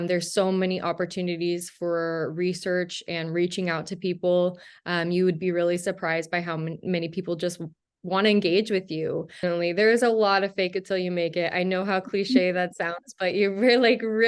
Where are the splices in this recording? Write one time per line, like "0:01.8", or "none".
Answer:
0:09.4